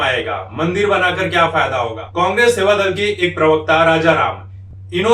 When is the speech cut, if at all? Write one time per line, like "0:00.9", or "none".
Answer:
0:02.0